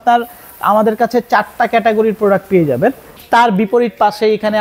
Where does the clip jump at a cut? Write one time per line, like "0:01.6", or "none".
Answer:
0:03.2